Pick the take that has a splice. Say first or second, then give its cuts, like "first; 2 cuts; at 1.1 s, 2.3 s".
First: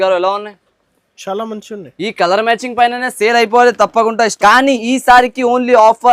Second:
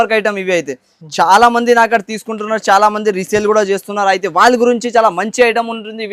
first; 1 cut; at 4.3 s